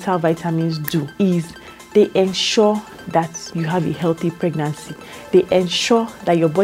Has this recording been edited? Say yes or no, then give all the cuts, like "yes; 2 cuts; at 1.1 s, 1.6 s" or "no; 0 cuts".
yes; 2 cuts; at 1.1 s, 3.4 s